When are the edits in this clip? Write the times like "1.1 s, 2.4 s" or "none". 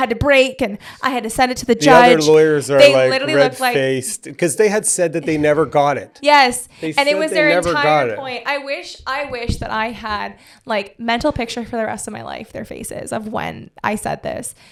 none